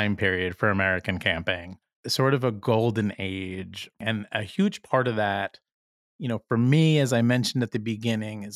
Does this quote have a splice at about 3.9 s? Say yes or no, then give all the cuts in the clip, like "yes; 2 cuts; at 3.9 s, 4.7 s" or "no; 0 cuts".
yes; 2 cuts; at 1.9 s, 3.9 s